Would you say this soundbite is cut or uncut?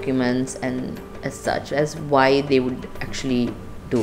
uncut